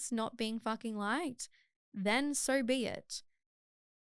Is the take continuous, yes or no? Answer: yes